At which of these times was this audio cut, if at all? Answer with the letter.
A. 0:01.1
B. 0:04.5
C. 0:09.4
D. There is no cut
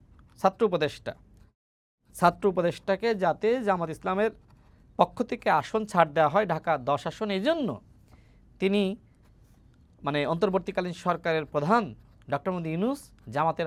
D